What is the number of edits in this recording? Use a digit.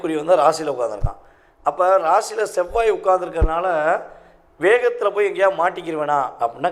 0